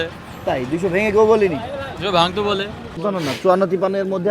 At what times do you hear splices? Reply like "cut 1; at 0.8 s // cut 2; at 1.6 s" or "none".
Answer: cut 1; at 3.0 s